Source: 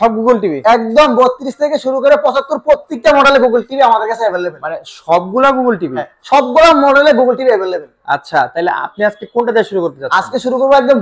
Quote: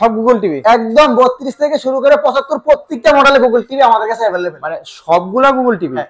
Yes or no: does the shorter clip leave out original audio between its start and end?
no